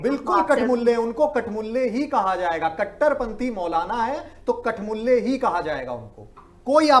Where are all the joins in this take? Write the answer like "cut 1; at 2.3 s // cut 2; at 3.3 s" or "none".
none